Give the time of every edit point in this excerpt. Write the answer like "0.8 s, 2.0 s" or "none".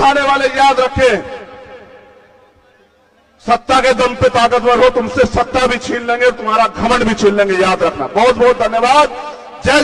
none